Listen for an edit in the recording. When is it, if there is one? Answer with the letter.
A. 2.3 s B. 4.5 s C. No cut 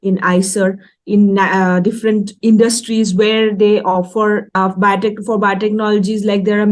B